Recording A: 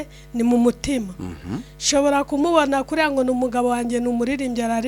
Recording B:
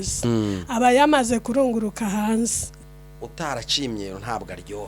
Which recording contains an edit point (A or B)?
B